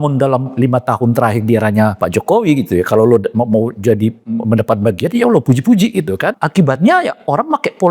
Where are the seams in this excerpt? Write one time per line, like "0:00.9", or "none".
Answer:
0:02.0
0:06.4